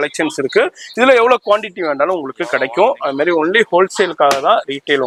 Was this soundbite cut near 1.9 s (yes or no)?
no